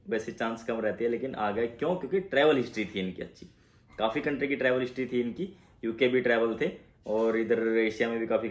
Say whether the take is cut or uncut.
uncut